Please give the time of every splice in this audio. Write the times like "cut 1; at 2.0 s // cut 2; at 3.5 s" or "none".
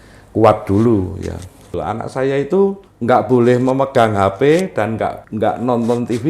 cut 1; at 1.8 s // cut 2; at 2.9 s // cut 3; at 5.2 s